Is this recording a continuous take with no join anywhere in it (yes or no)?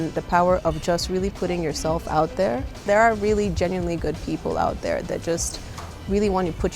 no